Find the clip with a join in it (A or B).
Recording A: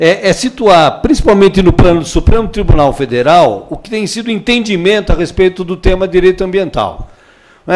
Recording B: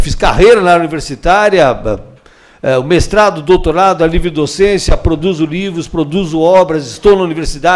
B